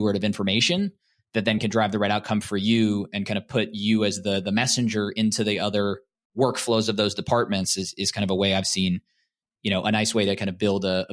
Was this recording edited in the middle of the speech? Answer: no; 0 cuts

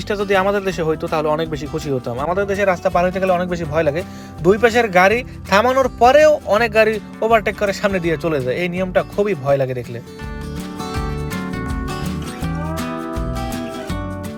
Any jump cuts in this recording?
no; 0 cuts

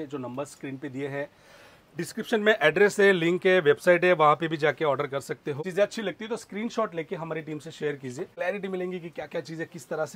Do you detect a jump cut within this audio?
yes; 2 cuts; at 5.6 s, 8.3 s

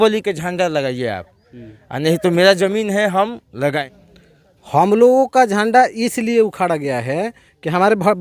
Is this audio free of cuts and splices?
no; 1 cut; at 3.8 s

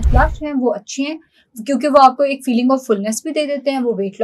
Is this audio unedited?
yes; 0 cuts

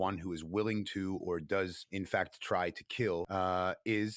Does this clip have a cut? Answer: yes; 2 cuts; at 1.8 s, 3.3 s

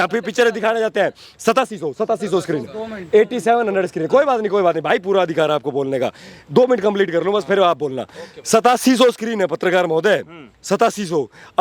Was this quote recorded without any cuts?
yes; 0 cuts

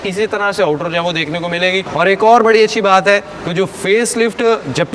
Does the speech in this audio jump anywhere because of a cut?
no; 0 cuts

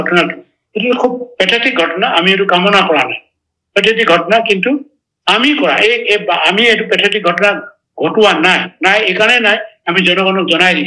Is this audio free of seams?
yes; 0 cuts

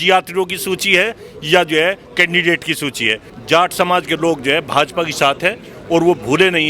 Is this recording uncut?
no; 1 cut; at 3.3 s

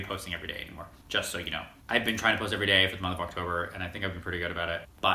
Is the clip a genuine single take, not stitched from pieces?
yes; 0 cuts

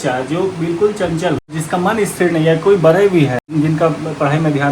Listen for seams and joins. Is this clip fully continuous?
no; 2 cuts; at 1.6 s, 3.5 s

